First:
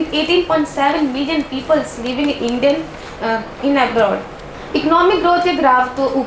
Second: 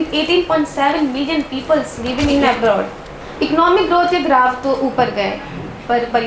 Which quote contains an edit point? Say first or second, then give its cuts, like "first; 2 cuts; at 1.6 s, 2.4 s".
second; 1 cut; at 2.3 s